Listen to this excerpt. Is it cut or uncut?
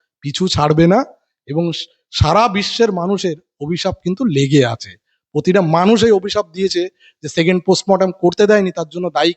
uncut